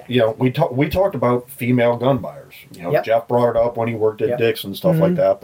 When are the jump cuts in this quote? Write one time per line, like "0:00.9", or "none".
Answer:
none

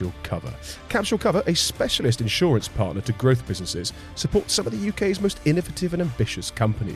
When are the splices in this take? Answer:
none

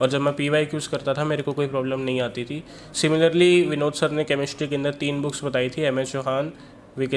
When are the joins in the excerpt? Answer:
none

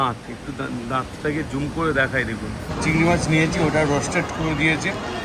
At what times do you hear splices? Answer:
0:02.7

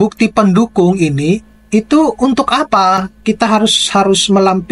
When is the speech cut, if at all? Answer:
none

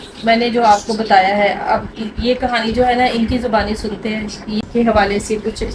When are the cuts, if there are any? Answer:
0:04.6

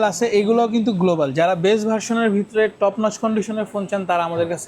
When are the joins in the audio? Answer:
none

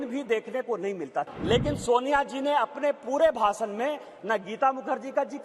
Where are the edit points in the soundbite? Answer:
0:01.3

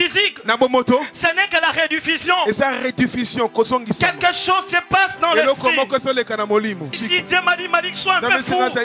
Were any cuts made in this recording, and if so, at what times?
0:06.6

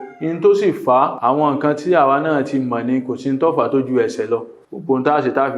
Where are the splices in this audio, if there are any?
0:01.2

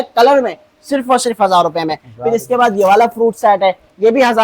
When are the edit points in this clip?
none

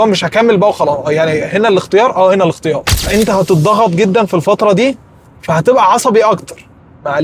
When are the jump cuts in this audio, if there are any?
0:02.9

